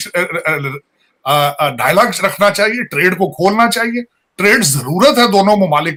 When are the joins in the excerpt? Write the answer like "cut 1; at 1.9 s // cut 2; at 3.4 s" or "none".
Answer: none

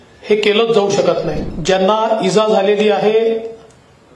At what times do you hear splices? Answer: cut 1; at 1.5 s

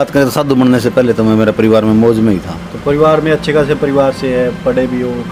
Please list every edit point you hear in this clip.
none

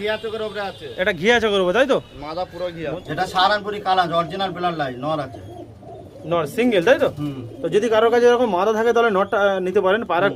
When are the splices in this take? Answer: cut 1; at 2.9 s

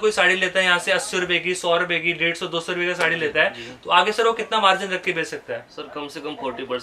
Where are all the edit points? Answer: none

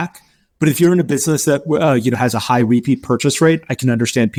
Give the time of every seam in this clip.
none

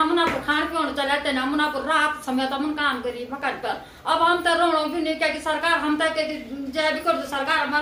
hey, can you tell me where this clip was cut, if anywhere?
none

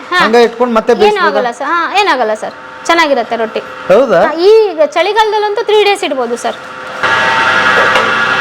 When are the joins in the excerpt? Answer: cut 1; at 7.0 s

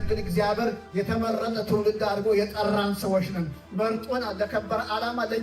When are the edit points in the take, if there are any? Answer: cut 1; at 3.6 s

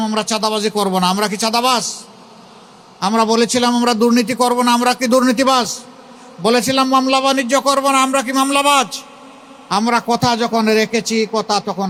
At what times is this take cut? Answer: none

